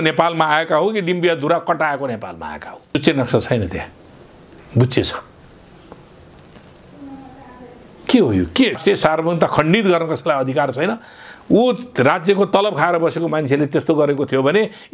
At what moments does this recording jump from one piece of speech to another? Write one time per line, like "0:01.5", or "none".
0:02.9
0:08.8